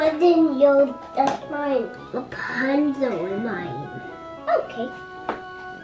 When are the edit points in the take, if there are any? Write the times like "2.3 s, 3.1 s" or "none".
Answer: none